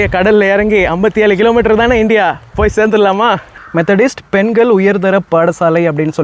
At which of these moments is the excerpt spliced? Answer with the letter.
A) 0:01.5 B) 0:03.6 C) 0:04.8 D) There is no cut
B